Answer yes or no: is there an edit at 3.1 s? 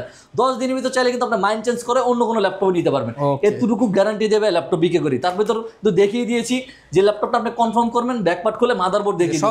no